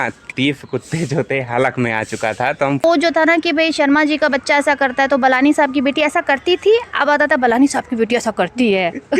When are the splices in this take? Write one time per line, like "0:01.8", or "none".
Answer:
0:02.8